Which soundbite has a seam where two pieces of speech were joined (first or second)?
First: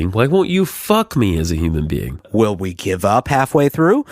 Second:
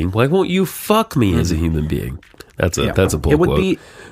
first